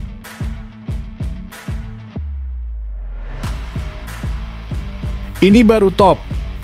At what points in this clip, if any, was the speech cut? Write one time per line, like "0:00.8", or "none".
none